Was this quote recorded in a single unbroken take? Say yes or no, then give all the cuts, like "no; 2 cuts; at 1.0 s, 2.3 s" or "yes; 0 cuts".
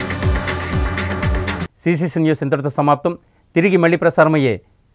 yes; 0 cuts